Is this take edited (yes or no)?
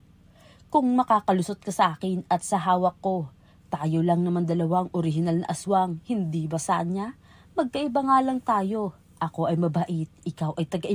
no